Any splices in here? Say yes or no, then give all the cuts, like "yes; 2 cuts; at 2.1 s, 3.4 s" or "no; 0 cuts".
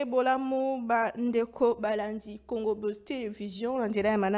no; 0 cuts